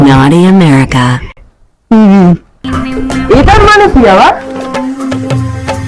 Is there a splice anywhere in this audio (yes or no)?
no